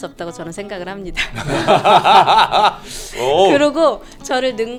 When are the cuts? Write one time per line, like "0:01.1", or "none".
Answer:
none